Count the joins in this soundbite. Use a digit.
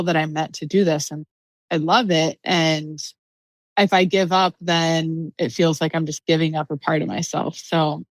0